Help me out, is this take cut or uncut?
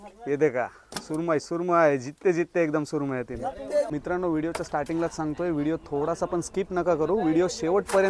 cut